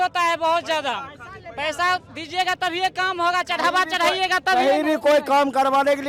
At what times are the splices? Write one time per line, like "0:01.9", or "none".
none